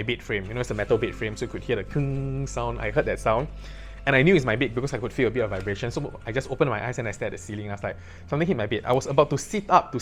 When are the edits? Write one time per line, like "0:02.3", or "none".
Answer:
none

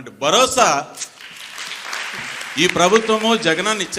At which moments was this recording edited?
0:02.2

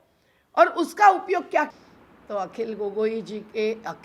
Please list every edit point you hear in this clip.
0:01.7

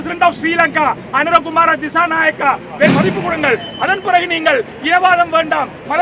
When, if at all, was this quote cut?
0:02.9

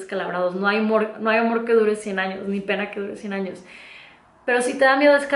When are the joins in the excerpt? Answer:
none

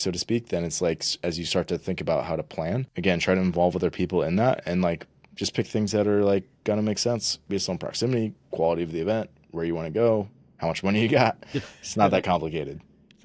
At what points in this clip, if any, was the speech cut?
0:02.9
0:07.4

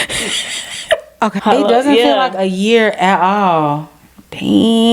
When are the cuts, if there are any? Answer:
0:01.4

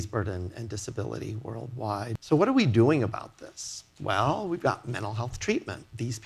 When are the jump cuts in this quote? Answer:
0:02.2

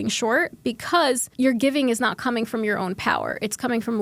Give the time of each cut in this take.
0:01.3

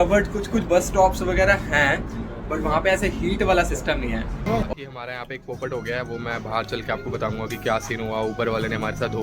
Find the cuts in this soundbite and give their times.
0:04.4

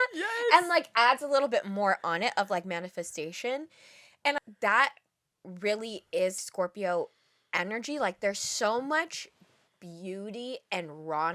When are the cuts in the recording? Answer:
0:04.4
0:06.4

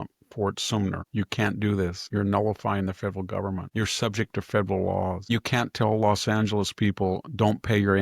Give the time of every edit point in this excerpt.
0:01.0
0:02.0
0:03.7
0:05.2

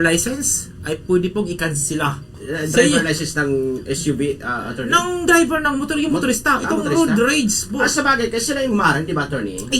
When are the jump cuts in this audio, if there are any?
0:02.4

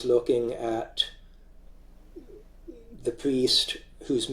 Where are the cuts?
none

